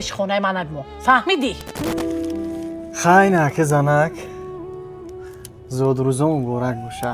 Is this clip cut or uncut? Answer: cut